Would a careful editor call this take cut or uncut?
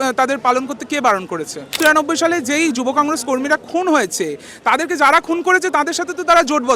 cut